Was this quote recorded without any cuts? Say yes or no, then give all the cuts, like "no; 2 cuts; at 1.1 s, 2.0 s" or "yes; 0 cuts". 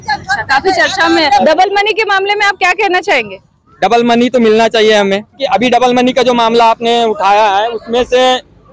no; 2 cuts; at 1.4 s, 5.4 s